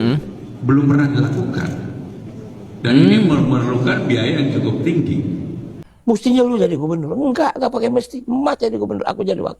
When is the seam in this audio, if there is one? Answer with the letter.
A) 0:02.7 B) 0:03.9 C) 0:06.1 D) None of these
C